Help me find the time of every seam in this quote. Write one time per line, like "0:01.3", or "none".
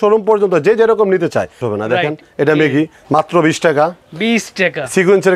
0:01.6
0:03.0